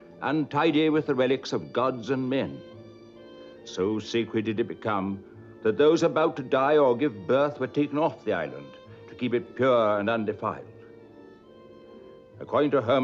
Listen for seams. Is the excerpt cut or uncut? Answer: uncut